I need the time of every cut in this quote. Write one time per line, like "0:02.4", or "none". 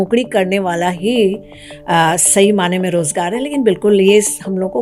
none